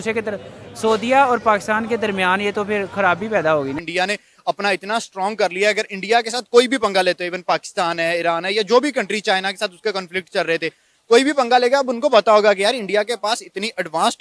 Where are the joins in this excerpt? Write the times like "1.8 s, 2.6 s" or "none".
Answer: 3.8 s

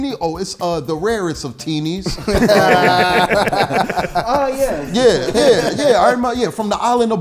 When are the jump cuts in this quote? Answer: none

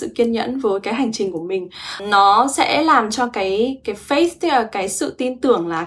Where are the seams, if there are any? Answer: 2.0 s

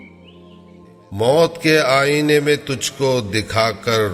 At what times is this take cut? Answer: 1.2 s

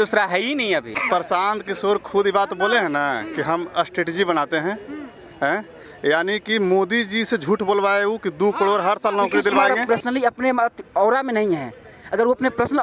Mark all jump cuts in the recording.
0.9 s, 9.7 s

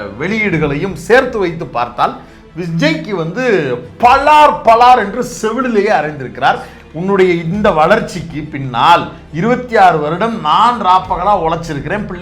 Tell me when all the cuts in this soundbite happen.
6.7 s

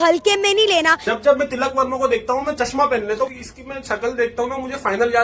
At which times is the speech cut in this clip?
1.3 s, 3.4 s

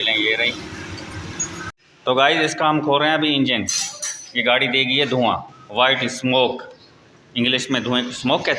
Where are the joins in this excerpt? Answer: 1.7 s

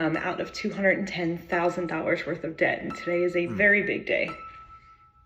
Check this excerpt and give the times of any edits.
none

